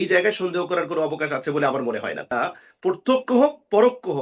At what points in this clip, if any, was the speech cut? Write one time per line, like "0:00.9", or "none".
0:02.3